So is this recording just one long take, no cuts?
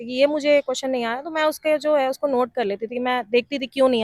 yes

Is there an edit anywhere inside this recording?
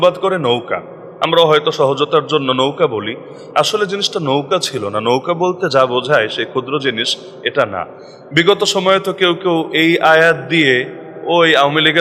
no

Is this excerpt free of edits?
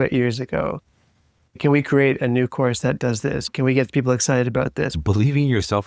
no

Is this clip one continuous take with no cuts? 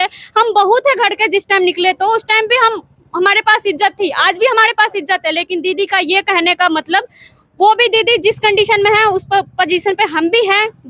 yes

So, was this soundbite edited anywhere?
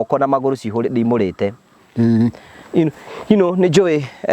no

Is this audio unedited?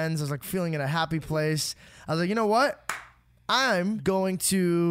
no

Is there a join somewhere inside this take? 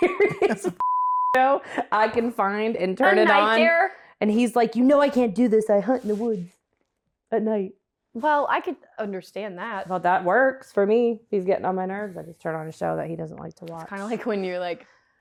no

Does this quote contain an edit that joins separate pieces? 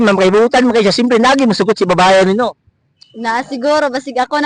no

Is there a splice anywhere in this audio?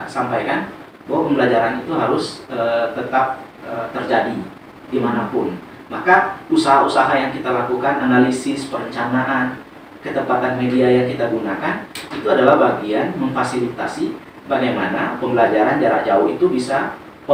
no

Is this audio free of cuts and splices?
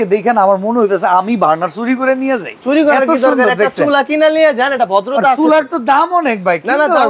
yes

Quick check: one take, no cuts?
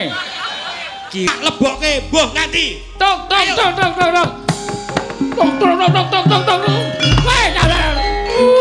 no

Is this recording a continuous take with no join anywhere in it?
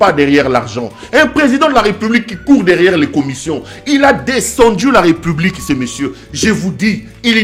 yes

